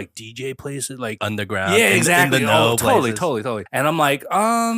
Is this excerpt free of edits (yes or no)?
no